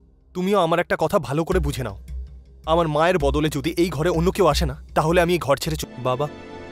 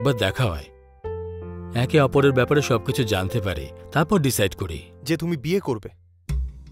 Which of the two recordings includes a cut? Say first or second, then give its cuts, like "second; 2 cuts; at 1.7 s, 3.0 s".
first; 1 cut; at 5.8 s